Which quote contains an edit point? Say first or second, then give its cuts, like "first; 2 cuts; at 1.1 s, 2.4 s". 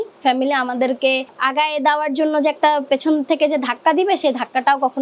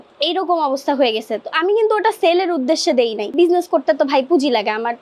second; 1 cut; at 3.2 s